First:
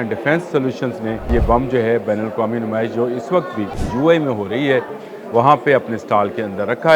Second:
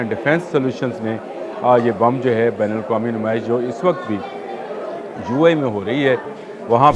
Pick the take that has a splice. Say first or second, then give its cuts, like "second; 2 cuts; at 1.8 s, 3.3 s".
first; 2 cuts; at 1.3 s, 3.8 s